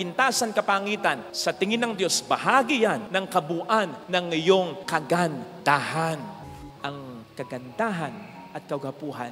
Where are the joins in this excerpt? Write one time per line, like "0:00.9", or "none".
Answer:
0:06.4